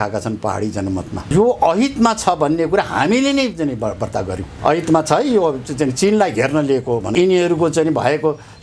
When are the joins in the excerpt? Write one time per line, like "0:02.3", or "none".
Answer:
0:01.2
0:04.5
0:07.1